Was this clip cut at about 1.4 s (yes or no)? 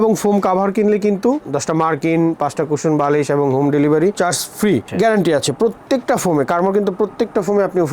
yes